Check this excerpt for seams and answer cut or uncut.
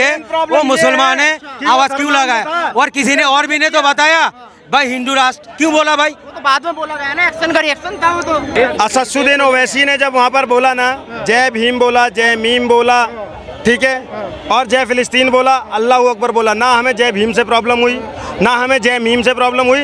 cut